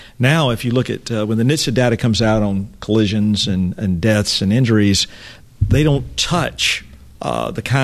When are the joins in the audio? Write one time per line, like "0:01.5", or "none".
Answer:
none

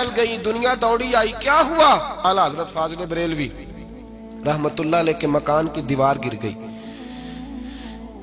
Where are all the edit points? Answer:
0:02.2

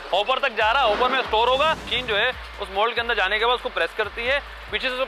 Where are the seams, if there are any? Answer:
0:01.9

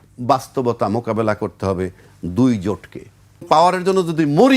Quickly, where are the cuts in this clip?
0:03.4

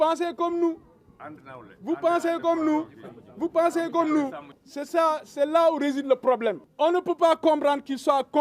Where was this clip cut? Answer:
0:04.5
0:06.7

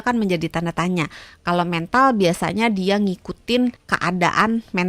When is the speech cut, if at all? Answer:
0:03.9

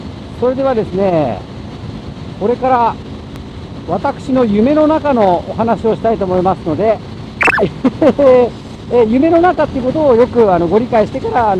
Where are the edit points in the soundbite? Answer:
none

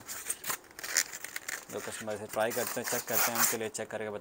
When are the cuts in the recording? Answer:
none

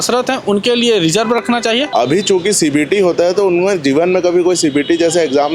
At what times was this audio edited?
0:01.9

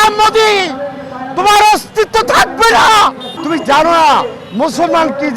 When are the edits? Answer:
0:03.3

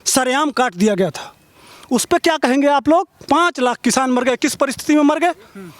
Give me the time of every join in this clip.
0:03.2

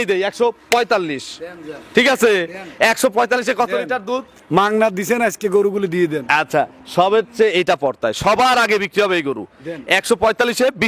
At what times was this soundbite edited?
none

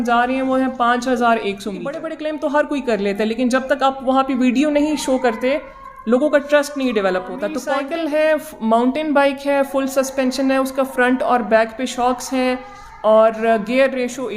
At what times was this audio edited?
0:02.1
0:07.5

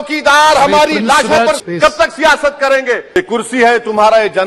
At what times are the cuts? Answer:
0:01.6
0:03.2

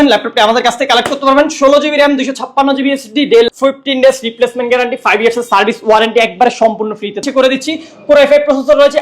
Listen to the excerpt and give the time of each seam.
0:03.5
0:07.3

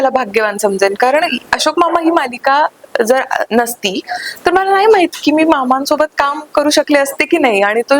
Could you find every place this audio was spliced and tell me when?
none

